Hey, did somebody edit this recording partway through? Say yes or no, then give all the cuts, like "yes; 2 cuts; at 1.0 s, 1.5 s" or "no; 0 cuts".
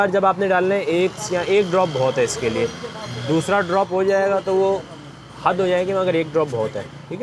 no; 0 cuts